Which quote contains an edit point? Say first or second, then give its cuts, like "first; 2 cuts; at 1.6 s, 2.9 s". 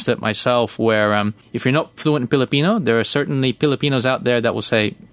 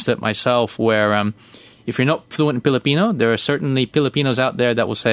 first; 1 cut; at 1.4 s